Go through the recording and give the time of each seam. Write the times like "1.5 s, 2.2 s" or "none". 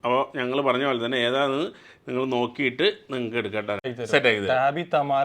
3.9 s